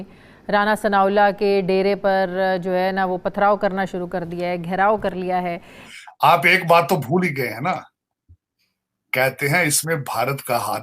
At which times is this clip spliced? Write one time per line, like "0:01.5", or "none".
0:05.7